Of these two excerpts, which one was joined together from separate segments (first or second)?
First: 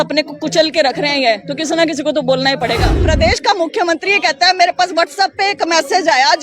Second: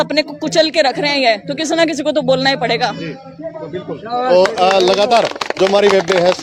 first